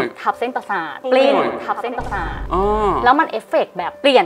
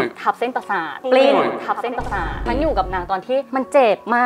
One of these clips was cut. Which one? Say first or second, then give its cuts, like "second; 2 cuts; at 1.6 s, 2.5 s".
second; 1 cut; at 2.4 s